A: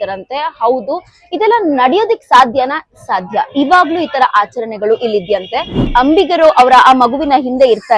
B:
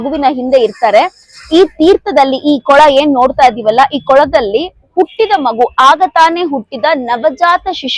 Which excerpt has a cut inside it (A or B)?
A